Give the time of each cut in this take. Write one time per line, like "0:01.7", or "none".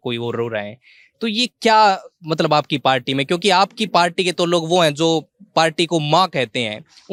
none